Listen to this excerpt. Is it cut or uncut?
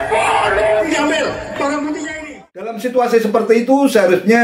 cut